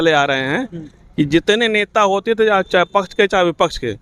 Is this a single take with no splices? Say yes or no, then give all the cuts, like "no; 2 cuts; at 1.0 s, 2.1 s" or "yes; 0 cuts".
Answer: yes; 0 cuts